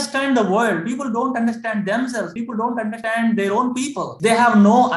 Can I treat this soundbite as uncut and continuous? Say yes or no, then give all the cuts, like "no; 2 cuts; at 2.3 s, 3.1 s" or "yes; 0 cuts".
yes; 0 cuts